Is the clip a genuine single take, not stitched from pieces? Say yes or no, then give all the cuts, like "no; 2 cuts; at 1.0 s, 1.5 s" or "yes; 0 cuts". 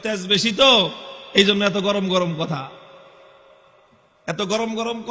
yes; 0 cuts